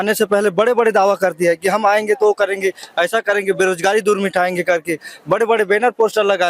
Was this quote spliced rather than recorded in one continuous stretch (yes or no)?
no